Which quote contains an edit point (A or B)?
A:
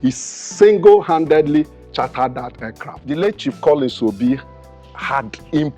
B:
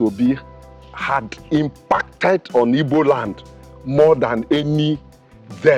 A